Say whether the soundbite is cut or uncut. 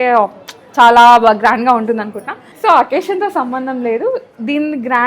cut